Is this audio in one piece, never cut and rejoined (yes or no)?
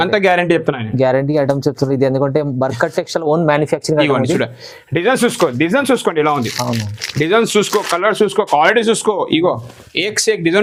yes